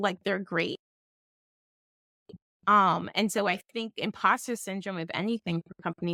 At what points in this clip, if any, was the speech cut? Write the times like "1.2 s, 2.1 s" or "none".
none